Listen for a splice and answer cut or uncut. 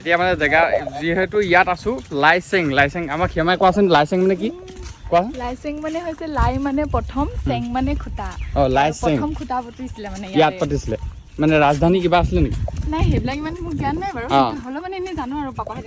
uncut